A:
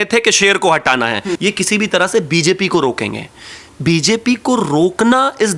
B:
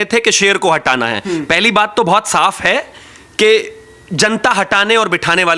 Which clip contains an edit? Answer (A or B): A